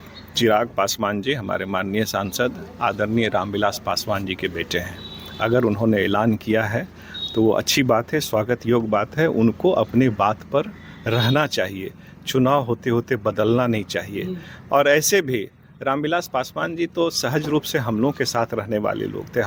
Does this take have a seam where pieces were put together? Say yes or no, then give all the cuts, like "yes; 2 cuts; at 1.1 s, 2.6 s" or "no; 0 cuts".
no; 0 cuts